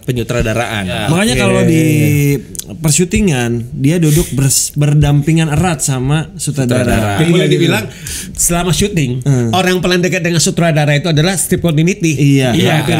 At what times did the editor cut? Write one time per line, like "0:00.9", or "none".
0:01.0
0:07.2